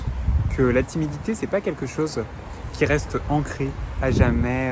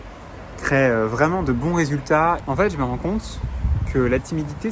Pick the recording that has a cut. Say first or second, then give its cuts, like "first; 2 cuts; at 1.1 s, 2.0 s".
second; 1 cut; at 2.4 s